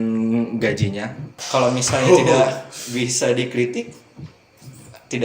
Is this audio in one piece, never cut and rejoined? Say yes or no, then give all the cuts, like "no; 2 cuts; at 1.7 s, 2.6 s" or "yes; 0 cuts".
no; 1 cut; at 1.4 s